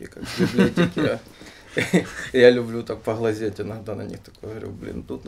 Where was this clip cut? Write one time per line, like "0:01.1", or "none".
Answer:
none

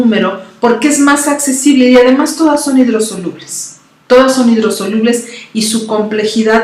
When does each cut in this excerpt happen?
0:05.5

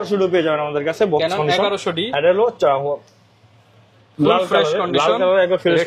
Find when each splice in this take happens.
none

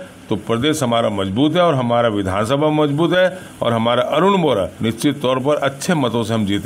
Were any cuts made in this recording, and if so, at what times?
none

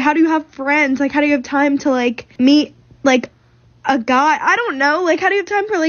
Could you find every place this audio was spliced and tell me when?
0:02.2

